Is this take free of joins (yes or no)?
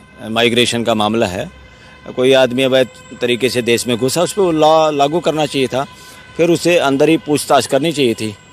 yes